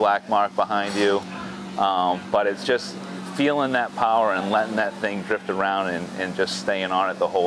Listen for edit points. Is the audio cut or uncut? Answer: uncut